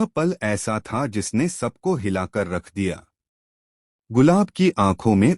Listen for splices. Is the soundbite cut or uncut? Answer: cut